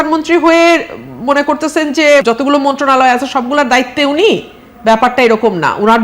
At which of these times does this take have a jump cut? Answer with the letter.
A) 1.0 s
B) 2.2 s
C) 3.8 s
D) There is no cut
B